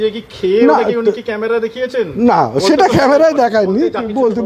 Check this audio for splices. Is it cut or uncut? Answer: uncut